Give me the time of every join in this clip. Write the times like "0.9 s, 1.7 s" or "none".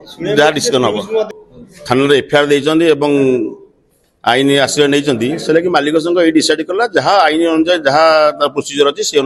1.3 s